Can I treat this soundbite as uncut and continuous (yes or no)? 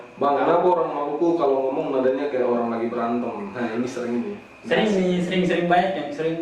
yes